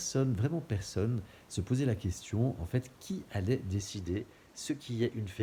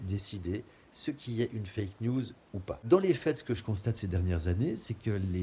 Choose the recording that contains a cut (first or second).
second